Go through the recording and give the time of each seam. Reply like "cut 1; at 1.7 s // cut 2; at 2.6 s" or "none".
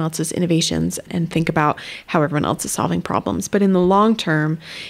cut 1; at 1.1 s